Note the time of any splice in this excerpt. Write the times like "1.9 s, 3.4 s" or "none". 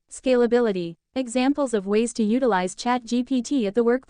1.0 s